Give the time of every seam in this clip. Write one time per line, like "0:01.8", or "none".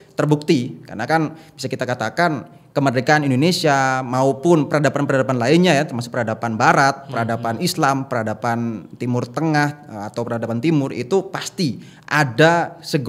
none